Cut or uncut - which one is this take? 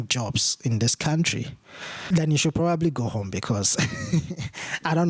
uncut